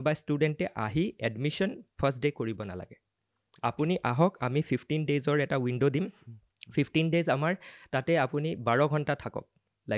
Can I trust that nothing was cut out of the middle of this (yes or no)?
yes